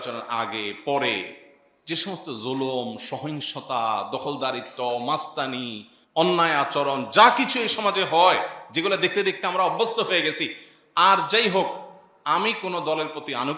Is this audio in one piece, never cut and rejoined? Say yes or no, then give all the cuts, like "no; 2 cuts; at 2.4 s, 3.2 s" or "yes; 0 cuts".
yes; 0 cuts